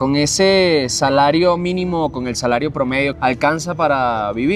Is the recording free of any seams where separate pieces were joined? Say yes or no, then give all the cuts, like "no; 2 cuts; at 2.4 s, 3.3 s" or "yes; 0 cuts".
no; 1 cut; at 3.1 s